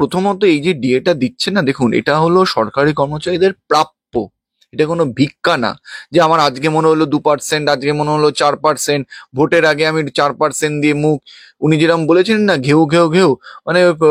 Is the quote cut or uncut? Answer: uncut